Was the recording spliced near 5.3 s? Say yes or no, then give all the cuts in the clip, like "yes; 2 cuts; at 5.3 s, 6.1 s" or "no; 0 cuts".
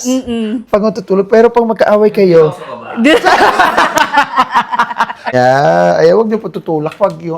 yes; 1 cut; at 5.3 s